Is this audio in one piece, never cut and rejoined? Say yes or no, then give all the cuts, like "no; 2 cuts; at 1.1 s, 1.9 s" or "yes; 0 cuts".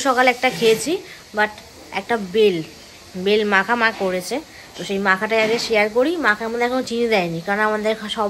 yes; 0 cuts